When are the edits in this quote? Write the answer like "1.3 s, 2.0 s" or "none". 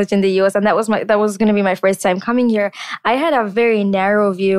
3.5 s